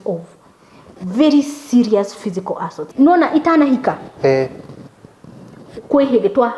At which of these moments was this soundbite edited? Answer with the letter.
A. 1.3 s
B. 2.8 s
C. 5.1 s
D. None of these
B